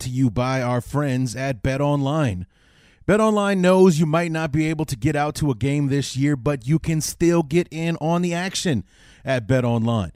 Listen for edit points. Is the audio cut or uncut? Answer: uncut